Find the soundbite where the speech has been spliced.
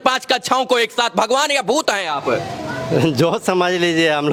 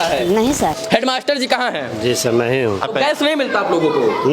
second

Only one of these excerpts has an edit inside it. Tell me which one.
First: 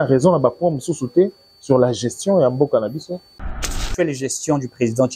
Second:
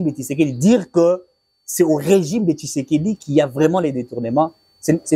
first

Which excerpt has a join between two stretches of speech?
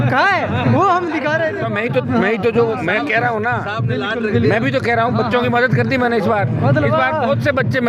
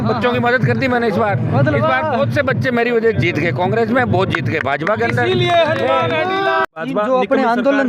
second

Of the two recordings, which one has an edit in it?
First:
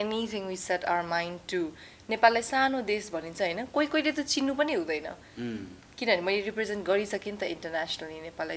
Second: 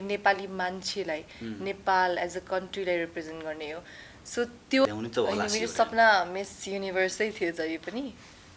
second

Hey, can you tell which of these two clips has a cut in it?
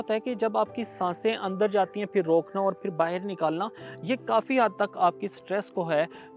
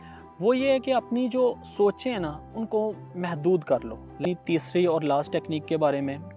second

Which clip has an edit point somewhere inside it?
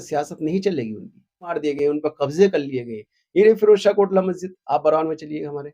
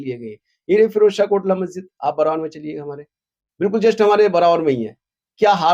first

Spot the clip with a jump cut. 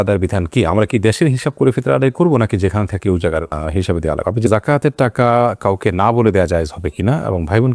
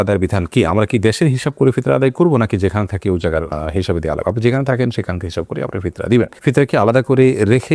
first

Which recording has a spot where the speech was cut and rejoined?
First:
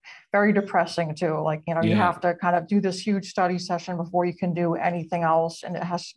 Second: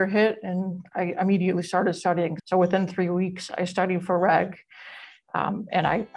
second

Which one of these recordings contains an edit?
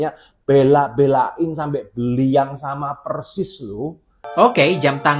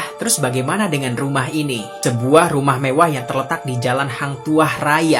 first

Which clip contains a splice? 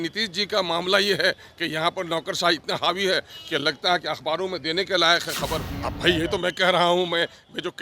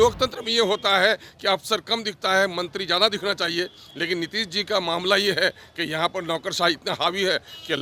first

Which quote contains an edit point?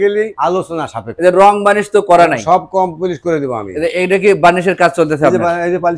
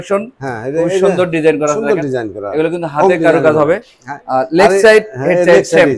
first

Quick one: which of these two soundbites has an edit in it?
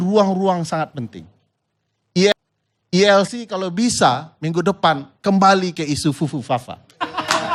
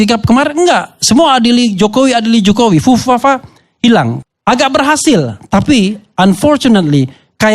second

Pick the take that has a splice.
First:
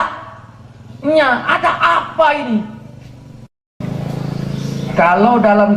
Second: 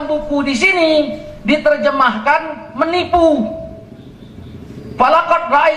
first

